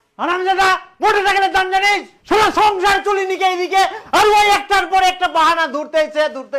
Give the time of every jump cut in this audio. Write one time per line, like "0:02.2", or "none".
none